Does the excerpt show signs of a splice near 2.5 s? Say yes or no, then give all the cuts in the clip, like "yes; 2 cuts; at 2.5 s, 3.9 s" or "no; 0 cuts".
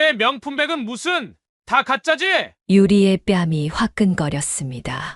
no; 0 cuts